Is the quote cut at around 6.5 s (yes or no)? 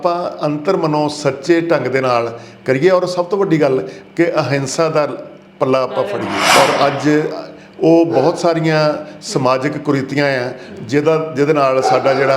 yes